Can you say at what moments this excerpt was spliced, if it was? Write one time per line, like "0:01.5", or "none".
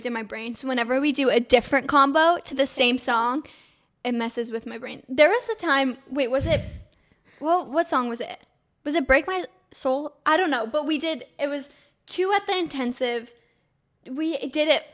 none